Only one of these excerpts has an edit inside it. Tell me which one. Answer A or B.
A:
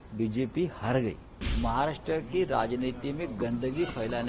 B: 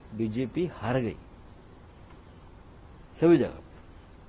A